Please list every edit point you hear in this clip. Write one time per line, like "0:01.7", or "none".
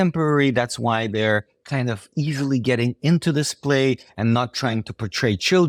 none